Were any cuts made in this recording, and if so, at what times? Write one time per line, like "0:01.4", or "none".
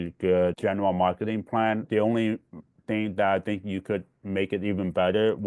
0:01.8